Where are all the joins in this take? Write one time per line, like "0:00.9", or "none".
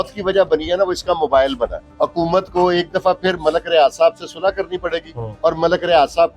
0:01.8
0:05.2